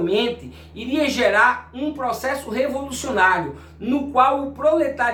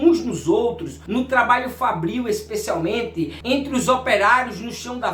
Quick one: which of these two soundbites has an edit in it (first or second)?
second